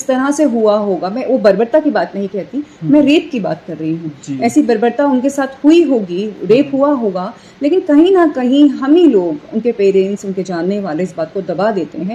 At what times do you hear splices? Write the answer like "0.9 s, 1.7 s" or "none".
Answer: none